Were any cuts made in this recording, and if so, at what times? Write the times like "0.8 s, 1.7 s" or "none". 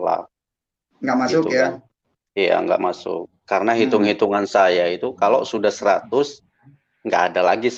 none